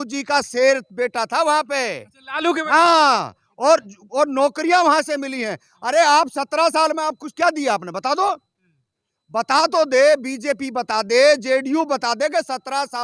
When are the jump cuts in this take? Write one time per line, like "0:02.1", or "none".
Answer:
none